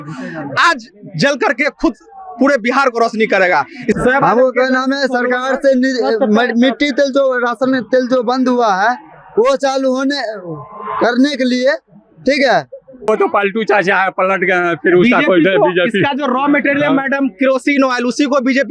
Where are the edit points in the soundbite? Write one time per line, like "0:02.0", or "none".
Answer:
0:03.9
0:13.1